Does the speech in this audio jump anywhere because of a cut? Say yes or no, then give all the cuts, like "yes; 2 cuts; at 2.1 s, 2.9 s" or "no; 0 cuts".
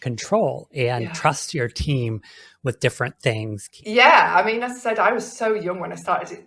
yes; 1 cut; at 3.7 s